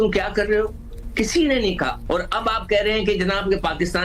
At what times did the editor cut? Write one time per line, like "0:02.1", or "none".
0:02.0